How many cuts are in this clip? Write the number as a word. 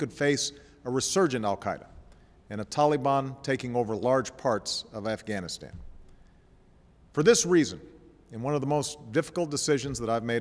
zero